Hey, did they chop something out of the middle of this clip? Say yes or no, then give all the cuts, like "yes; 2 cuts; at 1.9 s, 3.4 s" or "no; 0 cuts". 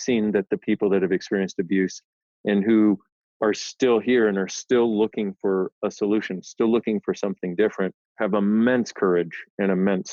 no; 0 cuts